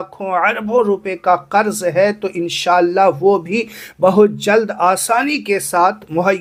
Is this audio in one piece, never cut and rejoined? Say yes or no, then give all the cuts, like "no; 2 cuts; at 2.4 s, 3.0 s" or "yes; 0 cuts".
yes; 0 cuts